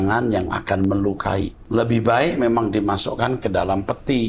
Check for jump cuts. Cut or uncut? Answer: cut